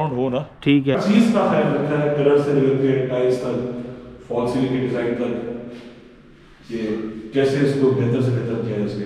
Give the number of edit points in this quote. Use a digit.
1